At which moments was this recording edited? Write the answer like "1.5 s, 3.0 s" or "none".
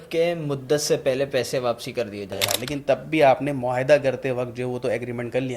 2.4 s